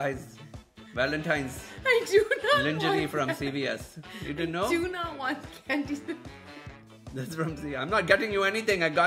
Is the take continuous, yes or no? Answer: yes